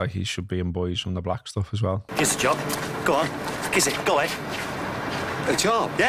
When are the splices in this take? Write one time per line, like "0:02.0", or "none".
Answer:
none